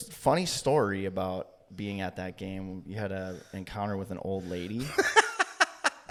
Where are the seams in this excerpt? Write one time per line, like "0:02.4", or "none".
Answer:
none